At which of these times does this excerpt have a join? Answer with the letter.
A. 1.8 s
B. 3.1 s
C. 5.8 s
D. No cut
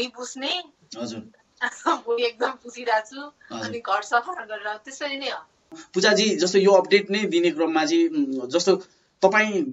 C